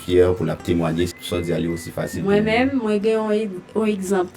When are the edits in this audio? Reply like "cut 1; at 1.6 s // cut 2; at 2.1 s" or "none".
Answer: cut 1; at 1.1 s